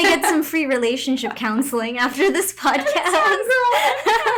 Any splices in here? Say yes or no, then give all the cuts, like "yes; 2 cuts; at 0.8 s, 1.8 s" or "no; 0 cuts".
no; 0 cuts